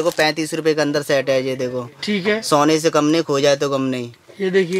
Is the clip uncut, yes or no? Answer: yes